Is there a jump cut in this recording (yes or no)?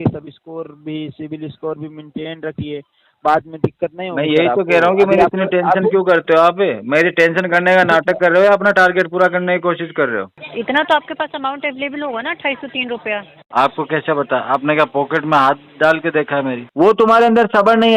yes